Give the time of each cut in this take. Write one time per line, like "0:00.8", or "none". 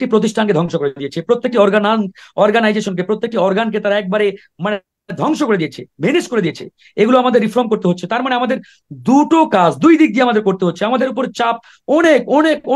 none